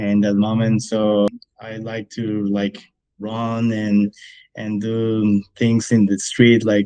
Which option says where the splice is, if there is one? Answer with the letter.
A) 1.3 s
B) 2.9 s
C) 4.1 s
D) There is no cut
A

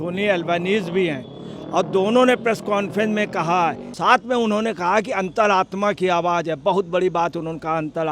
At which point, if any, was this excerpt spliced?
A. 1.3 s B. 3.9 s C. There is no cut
B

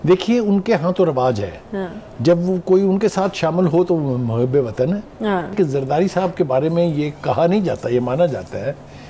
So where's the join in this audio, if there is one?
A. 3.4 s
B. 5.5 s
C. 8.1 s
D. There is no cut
B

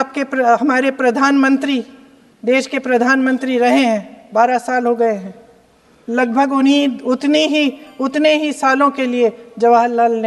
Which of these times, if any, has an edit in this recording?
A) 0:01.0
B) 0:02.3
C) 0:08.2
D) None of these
D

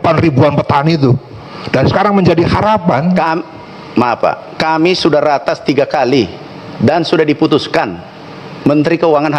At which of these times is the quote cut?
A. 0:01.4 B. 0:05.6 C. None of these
C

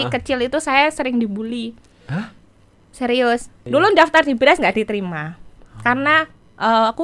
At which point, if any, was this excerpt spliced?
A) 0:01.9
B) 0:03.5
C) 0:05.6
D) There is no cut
B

